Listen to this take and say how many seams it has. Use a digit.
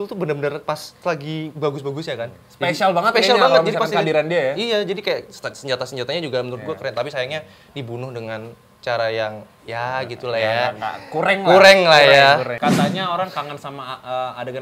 1